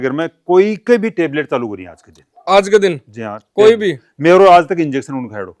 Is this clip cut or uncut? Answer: uncut